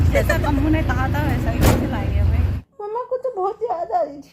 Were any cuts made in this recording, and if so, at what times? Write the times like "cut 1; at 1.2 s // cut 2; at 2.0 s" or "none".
cut 1; at 2.6 s

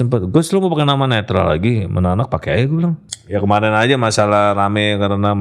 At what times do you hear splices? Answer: cut 1; at 3.1 s

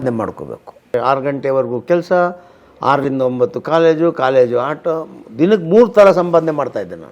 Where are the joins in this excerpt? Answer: cut 1; at 0.9 s

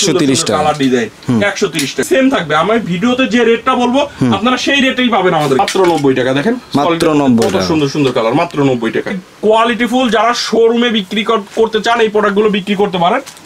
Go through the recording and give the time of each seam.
cut 1; at 2.1 s // cut 2; at 5.6 s // cut 3; at 9.3 s

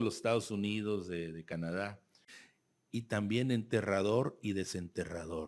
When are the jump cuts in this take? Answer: cut 1; at 1.8 s

